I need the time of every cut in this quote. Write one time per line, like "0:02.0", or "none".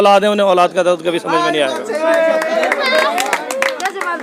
none

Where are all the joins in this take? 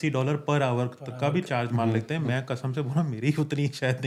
none

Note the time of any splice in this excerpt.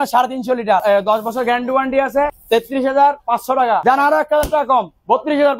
0:00.8
0:02.4
0:03.8

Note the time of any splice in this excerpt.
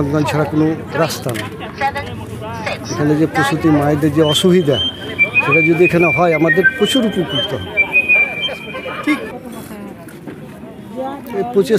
none

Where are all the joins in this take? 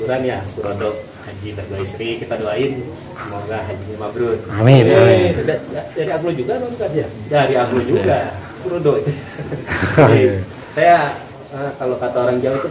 none

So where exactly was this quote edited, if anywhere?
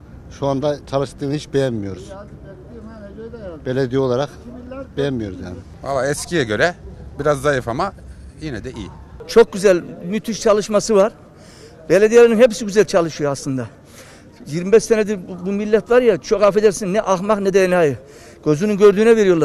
none

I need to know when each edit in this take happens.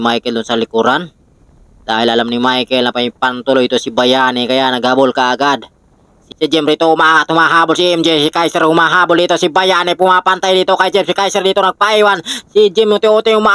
0:06.2

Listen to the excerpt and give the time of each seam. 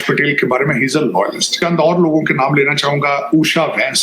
0:01.5

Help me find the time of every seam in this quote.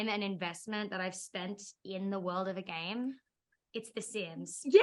none

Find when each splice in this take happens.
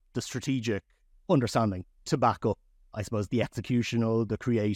0:01.1
0:02.8

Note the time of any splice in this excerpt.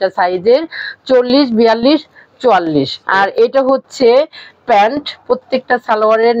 0:03.0
0:05.2

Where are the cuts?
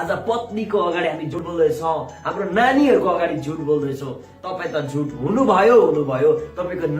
0:01.3

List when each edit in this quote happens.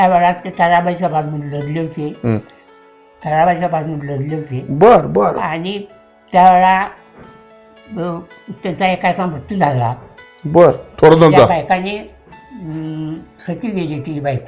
none

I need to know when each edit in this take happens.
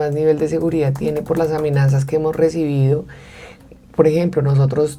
none

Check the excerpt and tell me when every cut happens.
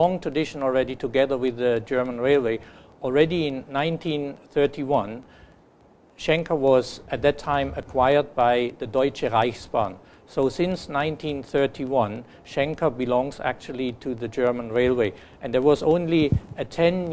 0:15.8

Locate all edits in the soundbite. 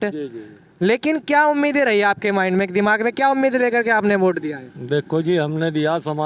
none

